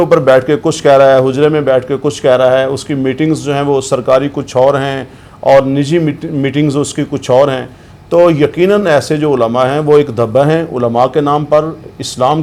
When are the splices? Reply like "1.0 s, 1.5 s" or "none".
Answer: none

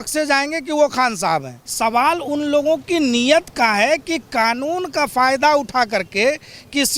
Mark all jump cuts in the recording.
1.6 s

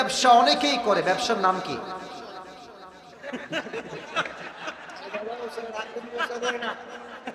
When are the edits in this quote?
none

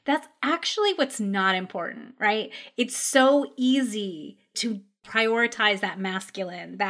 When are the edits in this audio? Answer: 5.1 s

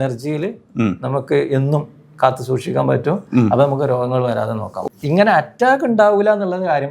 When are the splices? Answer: 4.8 s

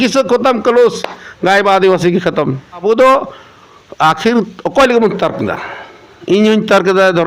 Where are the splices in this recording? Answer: 2.8 s

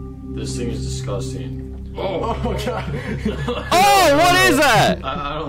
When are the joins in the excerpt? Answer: none

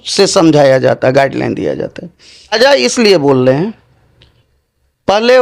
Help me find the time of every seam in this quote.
2.5 s

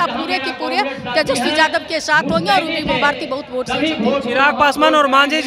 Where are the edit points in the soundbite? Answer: none

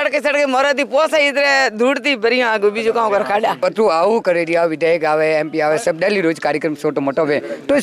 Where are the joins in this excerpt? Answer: 3.6 s

